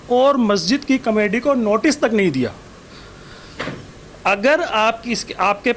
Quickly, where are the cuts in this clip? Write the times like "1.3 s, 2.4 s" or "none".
none